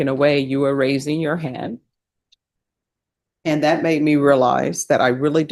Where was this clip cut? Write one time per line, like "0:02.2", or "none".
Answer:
none

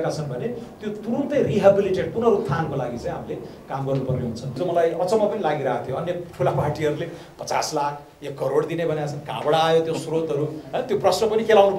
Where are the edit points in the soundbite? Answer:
0:04.5

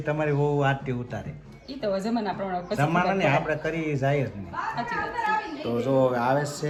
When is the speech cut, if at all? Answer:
none

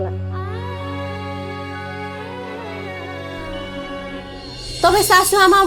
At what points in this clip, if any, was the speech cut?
0:04.6

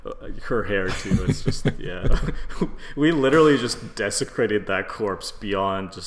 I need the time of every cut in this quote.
none

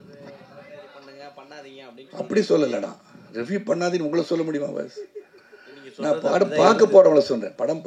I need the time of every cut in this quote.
none

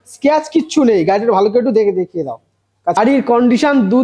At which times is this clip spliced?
0:03.0

